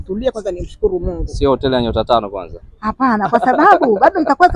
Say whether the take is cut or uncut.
uncut